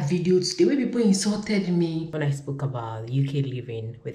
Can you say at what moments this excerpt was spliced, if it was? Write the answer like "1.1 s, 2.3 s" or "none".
2.1 s